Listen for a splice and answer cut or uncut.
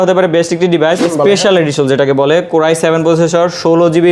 cut